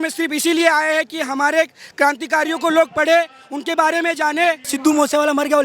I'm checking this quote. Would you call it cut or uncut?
cut